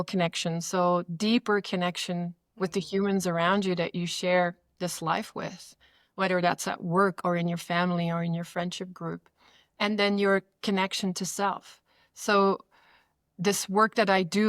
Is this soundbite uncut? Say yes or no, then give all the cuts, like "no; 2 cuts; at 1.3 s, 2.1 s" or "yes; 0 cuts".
yes; 0 cuts